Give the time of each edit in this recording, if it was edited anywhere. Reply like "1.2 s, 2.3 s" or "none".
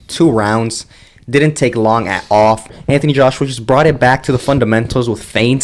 2.7 s

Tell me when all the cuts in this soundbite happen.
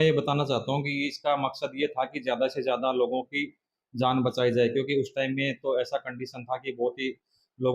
none

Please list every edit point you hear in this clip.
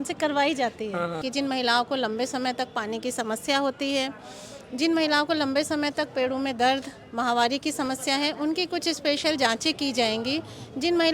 1.2 s

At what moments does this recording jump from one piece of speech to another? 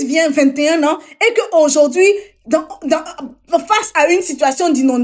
none

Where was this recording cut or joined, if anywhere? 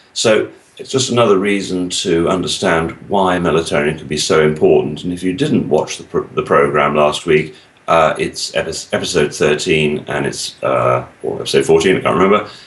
6.4 s

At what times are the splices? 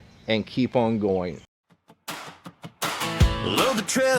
1.4 s

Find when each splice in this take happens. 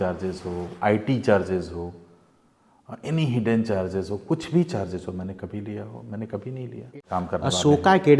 6.9 s

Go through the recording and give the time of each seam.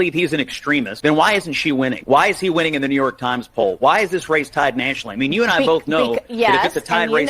0.9 s, 2.0 s

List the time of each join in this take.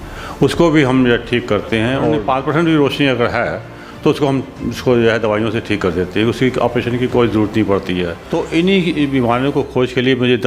2.2 s, 8.2 s

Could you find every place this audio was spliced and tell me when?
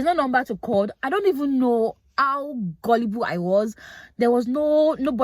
none

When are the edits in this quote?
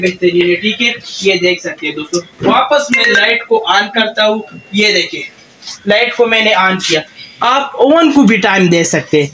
none

